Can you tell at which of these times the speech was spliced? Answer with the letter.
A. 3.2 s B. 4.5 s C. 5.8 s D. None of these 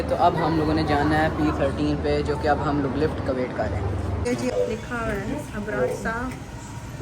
B